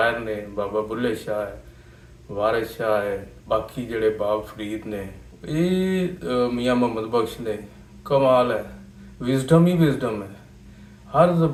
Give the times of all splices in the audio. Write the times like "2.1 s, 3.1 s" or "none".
none